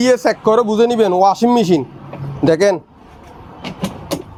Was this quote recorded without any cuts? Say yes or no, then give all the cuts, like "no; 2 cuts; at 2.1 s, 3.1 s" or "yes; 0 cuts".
yes; 0 cuts